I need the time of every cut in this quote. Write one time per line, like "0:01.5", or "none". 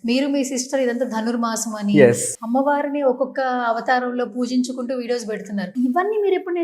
0:02.3
0:05.7